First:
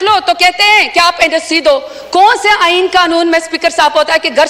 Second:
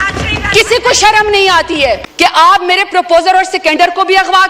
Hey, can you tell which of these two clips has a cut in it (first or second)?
second